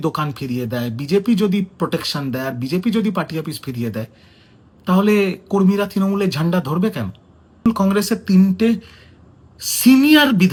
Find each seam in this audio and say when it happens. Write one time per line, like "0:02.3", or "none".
none